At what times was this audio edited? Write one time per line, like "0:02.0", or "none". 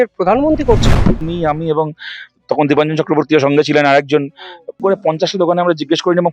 0:01.2
0:04.8